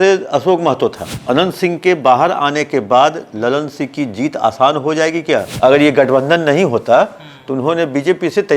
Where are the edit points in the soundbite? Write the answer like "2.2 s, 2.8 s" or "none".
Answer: 1.1 s, 5.5 s